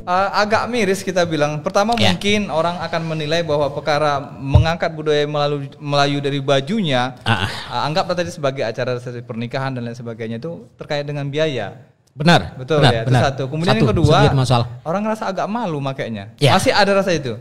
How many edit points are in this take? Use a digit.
0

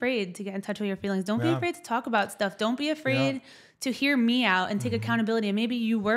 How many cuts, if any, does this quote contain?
0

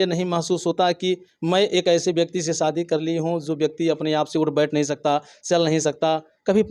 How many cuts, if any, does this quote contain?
0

